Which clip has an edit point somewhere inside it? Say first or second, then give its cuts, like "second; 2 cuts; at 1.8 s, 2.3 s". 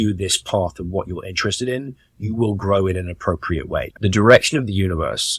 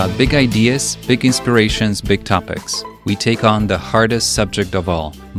first; 1 cut; at 3.9 s